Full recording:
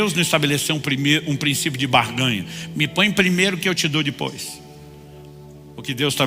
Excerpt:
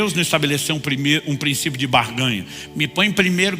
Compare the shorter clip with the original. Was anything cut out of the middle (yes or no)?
no